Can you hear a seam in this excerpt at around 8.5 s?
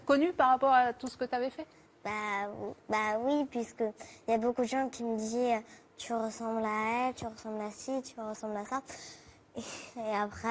yes; 1 cut; at 8.5 s

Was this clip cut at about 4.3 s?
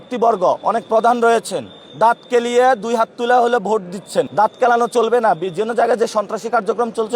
yes; 1 cut; at 4.3 s

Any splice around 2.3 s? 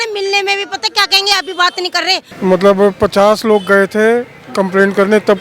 yes; 1 cut; at 2.3 s

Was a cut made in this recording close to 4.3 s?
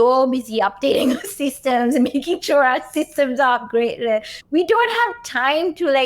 yes; 1 cut; at 4.3 s

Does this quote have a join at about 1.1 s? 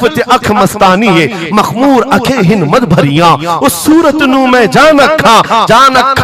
no; 0 cuts

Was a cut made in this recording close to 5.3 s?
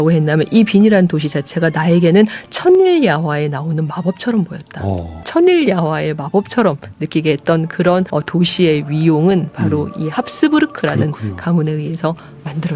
yes; 2 cuts; at 5.3 s, 8.1 s

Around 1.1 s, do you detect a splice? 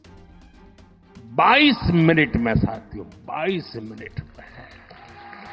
yes; 1 cut; at 1.1 s

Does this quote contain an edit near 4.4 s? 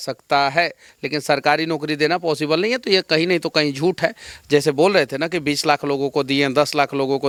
no; 0 cuts

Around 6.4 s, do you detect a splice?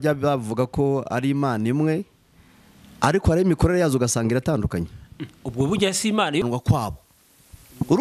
yes; 1 cut; at 6.4 s

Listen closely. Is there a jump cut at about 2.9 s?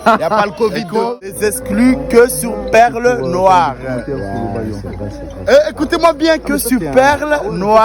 no; 1 cut; at 1.4 s

